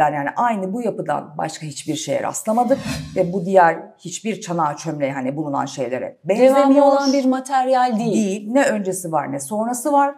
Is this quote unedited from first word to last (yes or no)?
yes